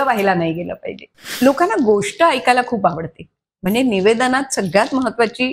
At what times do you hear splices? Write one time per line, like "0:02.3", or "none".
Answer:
0:01.3

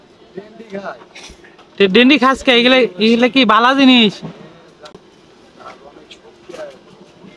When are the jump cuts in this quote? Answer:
0:04.9

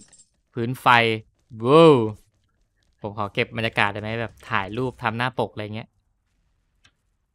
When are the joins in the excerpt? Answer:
none

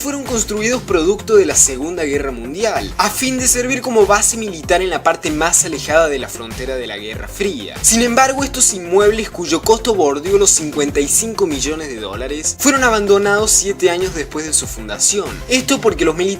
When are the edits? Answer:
0:10.3

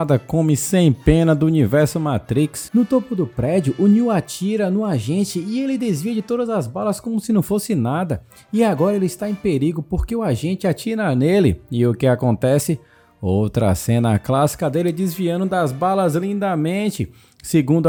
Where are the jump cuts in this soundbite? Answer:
none

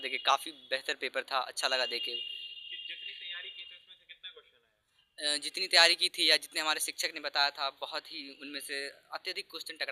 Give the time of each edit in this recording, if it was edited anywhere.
none

